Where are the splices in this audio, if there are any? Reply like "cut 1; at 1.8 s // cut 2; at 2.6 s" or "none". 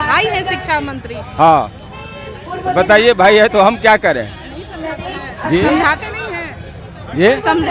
none